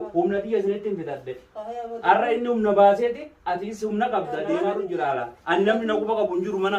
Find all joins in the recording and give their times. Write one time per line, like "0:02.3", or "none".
0:04.9